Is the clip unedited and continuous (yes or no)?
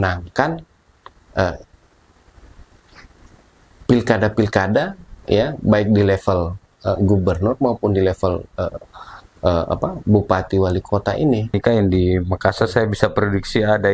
no